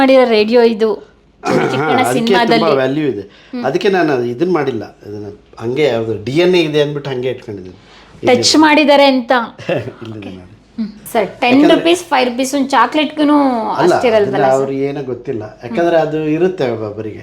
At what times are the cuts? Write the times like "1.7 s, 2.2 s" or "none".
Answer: 11.0 s